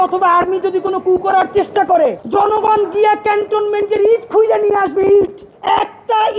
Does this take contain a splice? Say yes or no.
yes